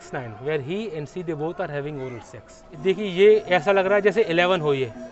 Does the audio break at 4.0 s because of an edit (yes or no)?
no